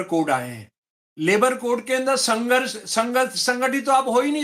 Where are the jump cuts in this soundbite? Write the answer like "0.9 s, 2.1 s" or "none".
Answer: none